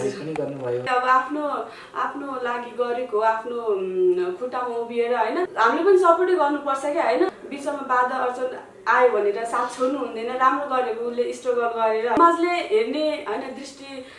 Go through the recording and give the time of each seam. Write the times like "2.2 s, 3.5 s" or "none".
0.9 s, 5.5 s, 7.4 s, 12.2 s